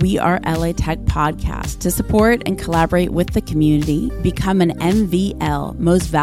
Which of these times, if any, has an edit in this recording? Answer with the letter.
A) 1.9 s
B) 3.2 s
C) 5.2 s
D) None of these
D